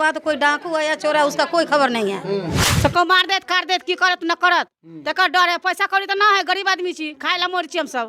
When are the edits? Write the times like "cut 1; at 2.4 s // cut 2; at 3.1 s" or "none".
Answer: cut 1; at 2.6 s